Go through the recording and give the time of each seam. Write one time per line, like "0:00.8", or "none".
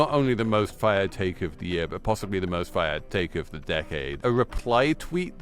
0:04.1